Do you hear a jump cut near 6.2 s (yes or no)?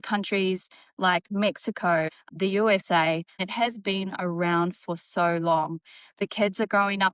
no